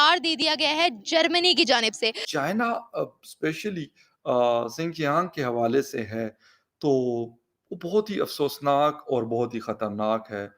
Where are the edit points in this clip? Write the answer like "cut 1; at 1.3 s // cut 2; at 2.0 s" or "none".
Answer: cut 1; at 2.2 s